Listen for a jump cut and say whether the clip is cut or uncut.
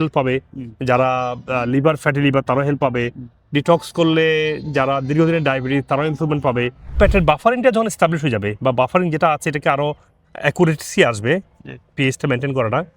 cut